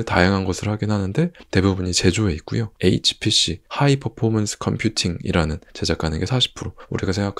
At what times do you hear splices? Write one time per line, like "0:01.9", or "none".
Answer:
0:02.7
0:05.7